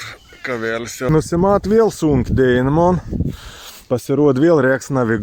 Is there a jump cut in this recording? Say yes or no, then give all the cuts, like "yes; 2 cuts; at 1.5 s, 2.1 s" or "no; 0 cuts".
yes; 1 cut; at 1.1 s